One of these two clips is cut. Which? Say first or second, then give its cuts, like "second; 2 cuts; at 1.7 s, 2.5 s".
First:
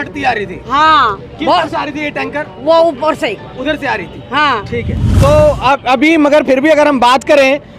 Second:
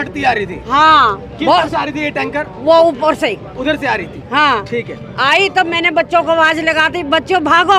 first; 1 cut; at 5.0 s